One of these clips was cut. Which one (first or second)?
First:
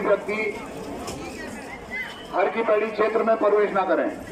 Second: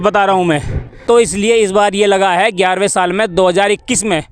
second